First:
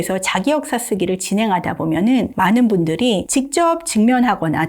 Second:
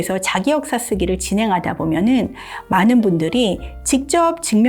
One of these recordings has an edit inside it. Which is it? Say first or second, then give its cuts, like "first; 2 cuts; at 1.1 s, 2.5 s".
first; 2 cuts; at 2.3 s, 3.2 s